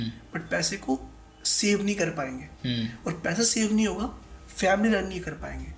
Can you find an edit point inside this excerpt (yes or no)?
no